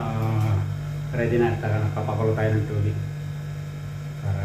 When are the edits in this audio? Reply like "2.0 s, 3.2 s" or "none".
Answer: none